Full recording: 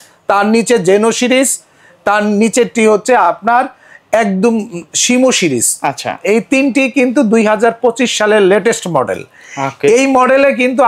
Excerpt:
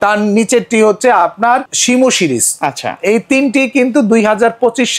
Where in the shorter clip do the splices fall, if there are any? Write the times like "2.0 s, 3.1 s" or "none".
1.7 s